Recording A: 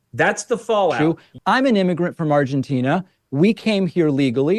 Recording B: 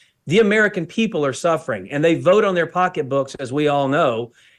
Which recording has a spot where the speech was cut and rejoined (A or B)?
A